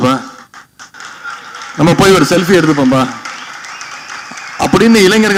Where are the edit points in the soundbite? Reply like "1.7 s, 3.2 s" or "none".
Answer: none